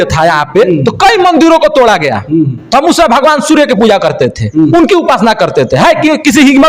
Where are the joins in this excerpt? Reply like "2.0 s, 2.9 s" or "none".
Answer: none